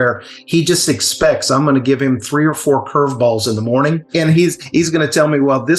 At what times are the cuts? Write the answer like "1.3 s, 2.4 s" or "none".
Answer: 4.1 s